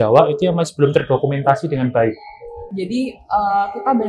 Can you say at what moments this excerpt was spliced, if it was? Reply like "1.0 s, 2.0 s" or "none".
2.6 s